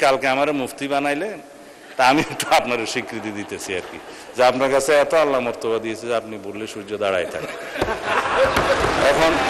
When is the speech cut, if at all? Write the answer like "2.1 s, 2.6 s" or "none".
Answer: none